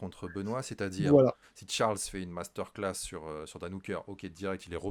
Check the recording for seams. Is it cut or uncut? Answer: cut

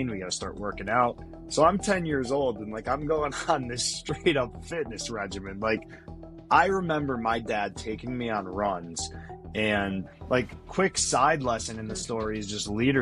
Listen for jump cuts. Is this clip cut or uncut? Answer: cut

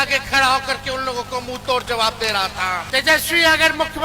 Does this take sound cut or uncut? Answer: cut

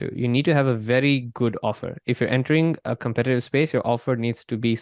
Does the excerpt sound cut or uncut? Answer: uncut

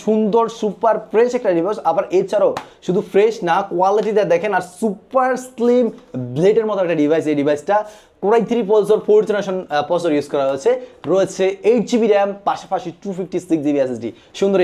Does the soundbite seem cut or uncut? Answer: uncut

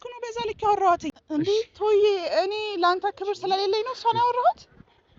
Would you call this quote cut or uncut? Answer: uncut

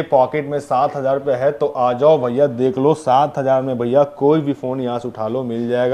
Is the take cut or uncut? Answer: uncut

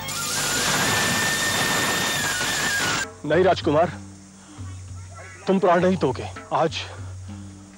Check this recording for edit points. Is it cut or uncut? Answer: cut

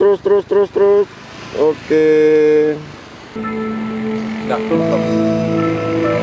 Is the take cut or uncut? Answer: uncut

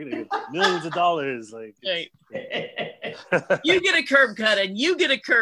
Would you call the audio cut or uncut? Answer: uncut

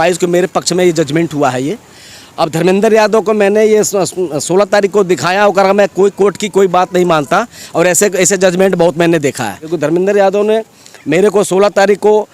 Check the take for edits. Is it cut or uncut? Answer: cut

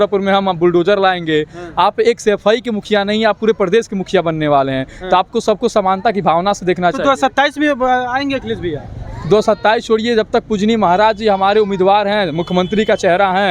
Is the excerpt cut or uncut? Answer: uncut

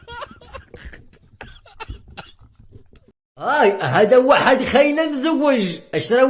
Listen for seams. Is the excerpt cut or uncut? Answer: cut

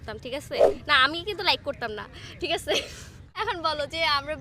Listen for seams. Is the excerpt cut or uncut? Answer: cut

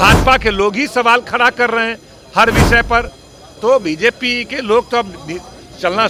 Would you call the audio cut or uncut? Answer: uncut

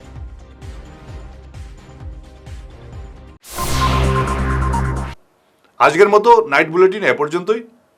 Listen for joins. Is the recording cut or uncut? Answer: uncut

